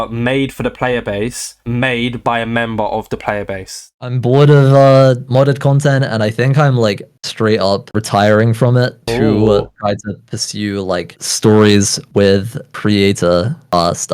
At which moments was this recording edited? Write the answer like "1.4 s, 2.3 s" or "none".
3.9 s

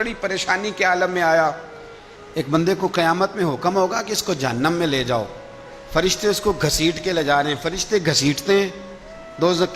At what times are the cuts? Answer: 2.1 s

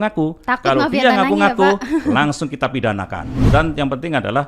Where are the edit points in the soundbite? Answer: 3.2 s

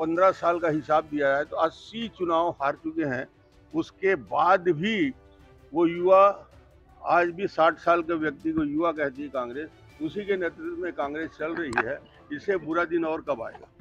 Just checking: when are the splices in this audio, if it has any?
none

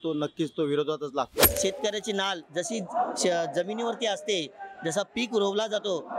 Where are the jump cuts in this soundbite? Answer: 1.5 s

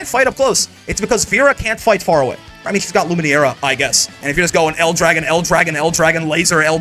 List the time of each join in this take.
2.7 s, 4.1 s

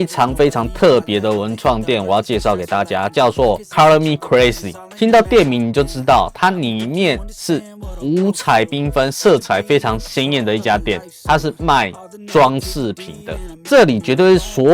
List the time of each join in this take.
none

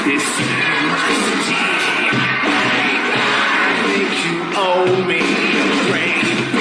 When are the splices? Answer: none

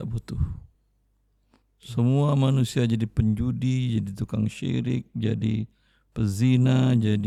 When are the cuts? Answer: none

